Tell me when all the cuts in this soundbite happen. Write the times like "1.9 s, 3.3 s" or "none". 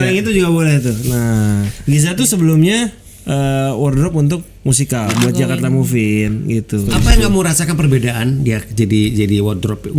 1.7 s, 5.1 s, 6.9 s